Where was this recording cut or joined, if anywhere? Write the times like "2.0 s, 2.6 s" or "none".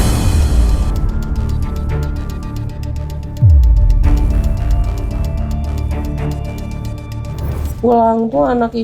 7.6 s

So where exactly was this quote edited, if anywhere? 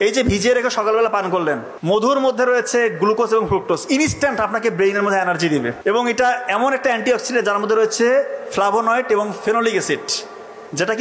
1.7 s, 5.8 s

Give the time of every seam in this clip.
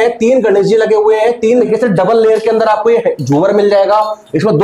1.7 s

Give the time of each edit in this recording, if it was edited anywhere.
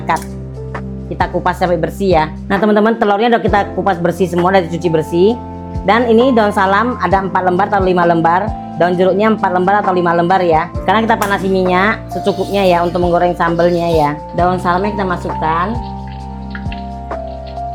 none

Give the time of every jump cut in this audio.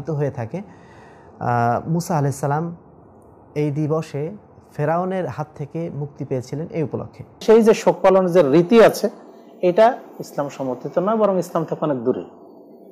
7.4 s

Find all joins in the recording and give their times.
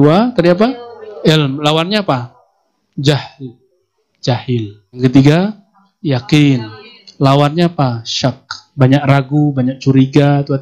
5.0 s

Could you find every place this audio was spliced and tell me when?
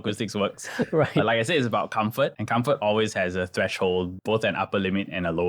2.4 s, 4.1 s

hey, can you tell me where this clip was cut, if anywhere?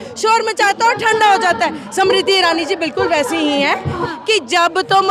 4.0 s

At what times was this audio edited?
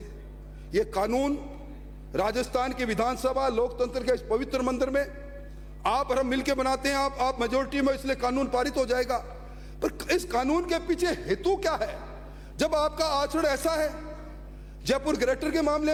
none

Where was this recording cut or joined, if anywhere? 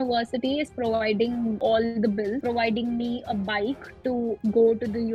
1.6 s, 2.4 s, 4.4 s

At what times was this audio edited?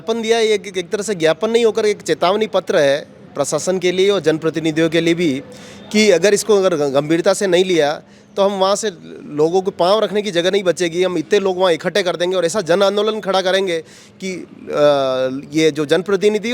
none

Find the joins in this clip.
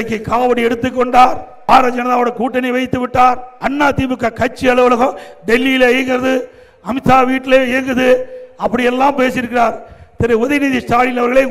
1.5 s, 3.5 s

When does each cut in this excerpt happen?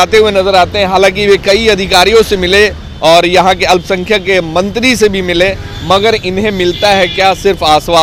none

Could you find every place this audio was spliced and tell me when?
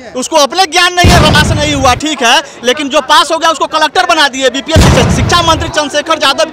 1.3 s, 4.9 s

